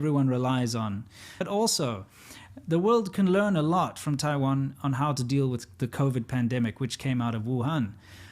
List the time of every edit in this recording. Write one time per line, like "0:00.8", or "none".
0:01.3